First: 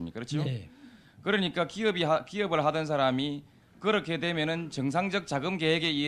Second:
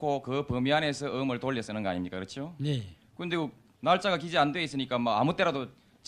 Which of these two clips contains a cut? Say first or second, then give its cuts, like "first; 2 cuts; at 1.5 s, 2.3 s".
second; 1 cut; at 2.6 s